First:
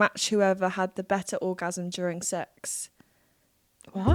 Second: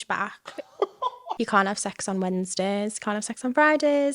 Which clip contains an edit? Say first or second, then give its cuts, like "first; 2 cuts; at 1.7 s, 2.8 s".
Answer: second; 1 cut; at 1.3 s